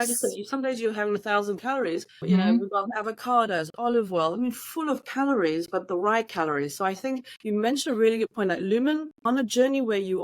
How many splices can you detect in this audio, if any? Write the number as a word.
two